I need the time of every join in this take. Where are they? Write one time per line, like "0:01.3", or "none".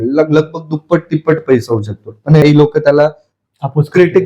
0:02.4